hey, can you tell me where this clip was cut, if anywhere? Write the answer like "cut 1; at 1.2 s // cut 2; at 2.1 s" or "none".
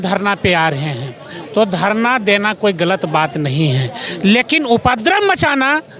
none